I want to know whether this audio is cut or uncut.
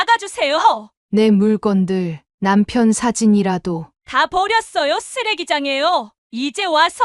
cut